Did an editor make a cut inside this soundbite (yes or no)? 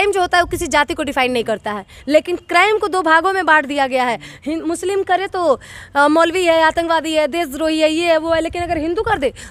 no